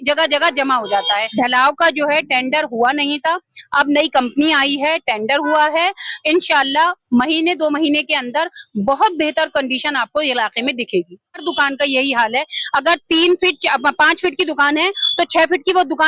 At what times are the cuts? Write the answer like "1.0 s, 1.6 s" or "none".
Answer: 1.3 s, 11.4 s